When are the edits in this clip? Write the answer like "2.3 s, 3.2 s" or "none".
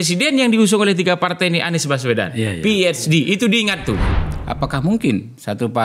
4.1 s